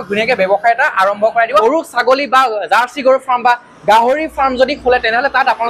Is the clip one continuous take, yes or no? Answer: no